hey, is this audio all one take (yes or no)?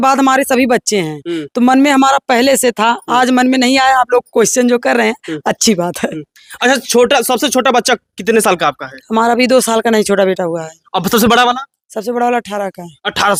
yes